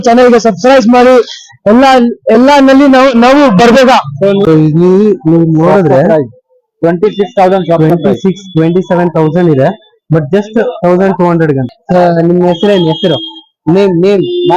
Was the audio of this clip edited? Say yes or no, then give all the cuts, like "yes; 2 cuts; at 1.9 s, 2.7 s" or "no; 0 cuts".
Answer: yes; 2 cuts; at 4.4 s, 11.7 s